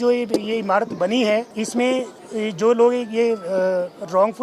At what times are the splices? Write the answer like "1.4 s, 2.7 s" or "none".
1.5 s, 2.2 s